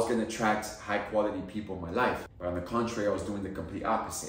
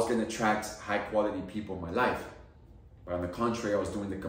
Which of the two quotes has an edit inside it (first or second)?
first